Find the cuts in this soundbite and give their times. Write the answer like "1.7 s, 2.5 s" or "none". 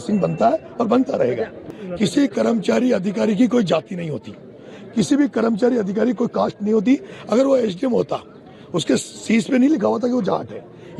1.7 s